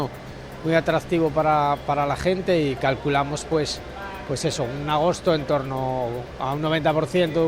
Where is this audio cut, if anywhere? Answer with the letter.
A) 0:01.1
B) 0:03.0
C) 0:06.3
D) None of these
D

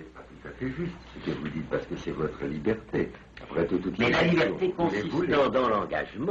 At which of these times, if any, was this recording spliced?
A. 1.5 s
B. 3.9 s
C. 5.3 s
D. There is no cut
A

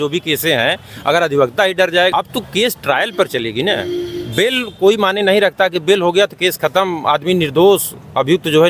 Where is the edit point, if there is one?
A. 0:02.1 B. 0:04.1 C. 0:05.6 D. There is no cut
A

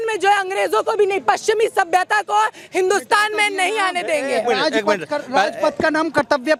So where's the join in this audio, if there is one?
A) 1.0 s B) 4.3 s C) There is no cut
C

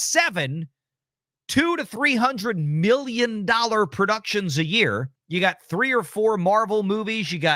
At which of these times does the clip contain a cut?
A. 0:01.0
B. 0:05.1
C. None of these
B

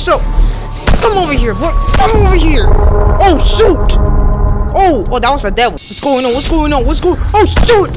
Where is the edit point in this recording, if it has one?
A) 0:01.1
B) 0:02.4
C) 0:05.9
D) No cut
C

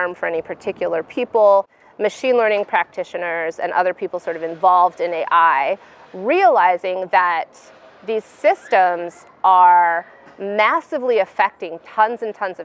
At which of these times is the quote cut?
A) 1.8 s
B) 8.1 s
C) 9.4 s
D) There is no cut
A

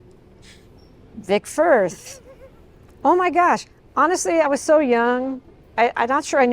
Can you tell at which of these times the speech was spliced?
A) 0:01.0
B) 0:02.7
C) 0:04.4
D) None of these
C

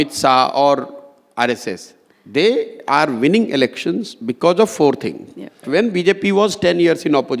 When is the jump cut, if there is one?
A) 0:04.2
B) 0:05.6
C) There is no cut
B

